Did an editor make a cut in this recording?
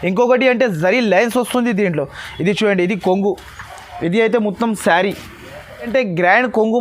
yes; 1 cut; at 5.9 s

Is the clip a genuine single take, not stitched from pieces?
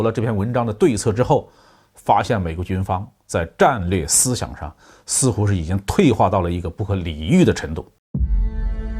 no; 1 cut; at 8.0 s

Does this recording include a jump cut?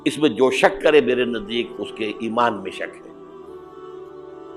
yes; 1 cut; at 3.3 s

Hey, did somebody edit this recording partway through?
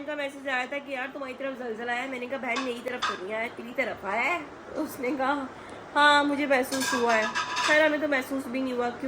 no; 0 cuts

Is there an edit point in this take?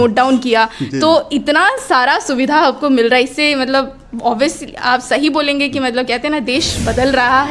no; 0 cuts

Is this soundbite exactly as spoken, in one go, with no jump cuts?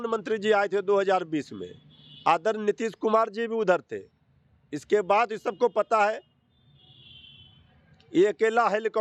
yes; 0 cuts

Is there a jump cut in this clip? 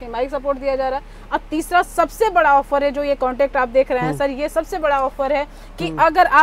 no; 0 cuts

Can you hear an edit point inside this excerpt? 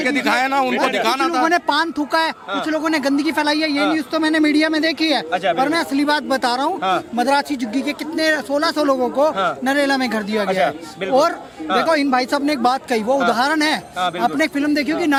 no; 0 cuts

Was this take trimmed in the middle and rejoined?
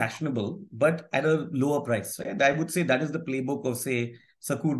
no; 0 cuts

